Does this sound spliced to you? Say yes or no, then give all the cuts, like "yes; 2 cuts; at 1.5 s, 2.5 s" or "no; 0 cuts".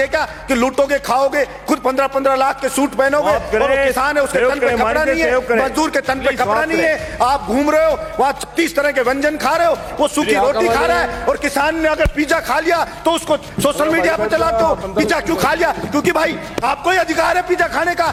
no; 0 cuts